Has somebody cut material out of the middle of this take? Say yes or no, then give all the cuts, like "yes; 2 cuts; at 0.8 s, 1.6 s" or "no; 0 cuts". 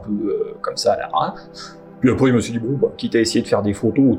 no; 0 cuts